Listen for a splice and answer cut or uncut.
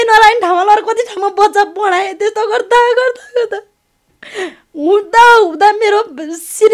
uncut